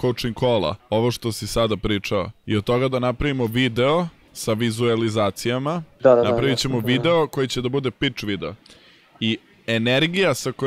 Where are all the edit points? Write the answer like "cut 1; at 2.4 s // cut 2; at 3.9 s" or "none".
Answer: cut 1; at 0.8 s // cut 2; at 2.4 s // cut 3; at 4.2 s // cut 4; at 5.9 s